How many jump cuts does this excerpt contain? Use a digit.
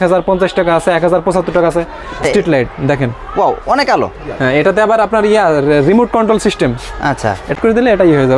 2